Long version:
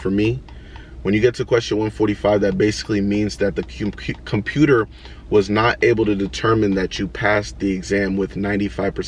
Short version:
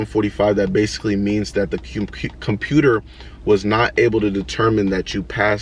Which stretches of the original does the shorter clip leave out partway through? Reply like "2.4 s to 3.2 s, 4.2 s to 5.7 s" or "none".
none